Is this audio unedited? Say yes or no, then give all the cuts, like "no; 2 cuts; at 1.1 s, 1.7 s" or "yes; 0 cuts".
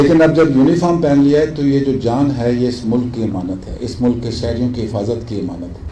yes; 0 cuts